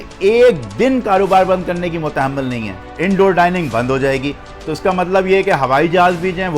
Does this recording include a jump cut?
yes; 1 cut; at 2.8 s

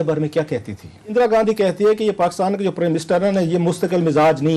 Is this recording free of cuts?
no; 1 cut; at 1.1 s

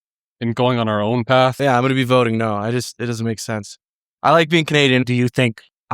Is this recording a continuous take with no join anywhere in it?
no; 2 cuts; at 1.6 s, 5.0 s

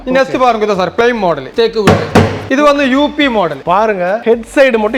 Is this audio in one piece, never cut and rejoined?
no; 3 cuts; at 1.4 s, 2.4 s, 4.1 s

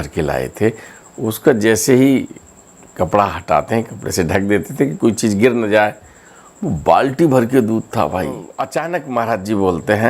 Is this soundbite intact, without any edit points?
no; 1 cut; at 8.5 s

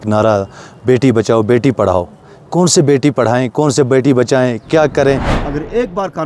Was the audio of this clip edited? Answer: yes; 1 cut; at 5.4 s

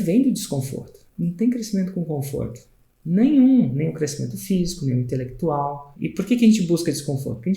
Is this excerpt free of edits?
no; 2 cuts; at 1.0 s, 5.9 s

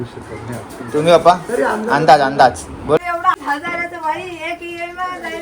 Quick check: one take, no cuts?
no; 1 cut; at 3.0 s

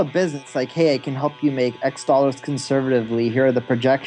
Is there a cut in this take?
no; 0 cuts

